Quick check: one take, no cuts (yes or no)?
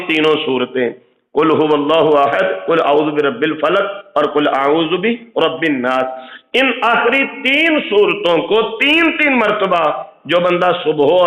yes